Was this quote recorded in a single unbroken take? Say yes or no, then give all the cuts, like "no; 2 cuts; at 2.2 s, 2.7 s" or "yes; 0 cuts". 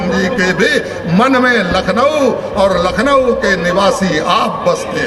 yes; 0 cuts